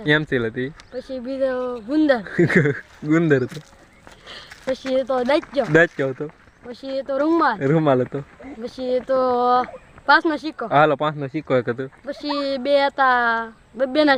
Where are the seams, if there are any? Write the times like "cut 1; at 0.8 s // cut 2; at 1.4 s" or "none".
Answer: none